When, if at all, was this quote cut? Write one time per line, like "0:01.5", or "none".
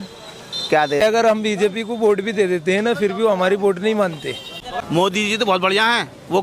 0:01.0
0:04.7